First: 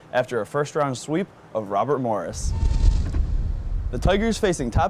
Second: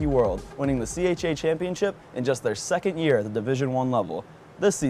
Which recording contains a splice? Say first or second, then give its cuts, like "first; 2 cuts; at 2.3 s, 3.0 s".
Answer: first; 1 cut; at 1.5 s